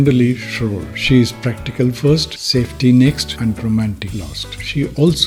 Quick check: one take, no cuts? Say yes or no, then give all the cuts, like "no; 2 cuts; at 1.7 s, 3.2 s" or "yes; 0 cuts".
yes; 0 cuts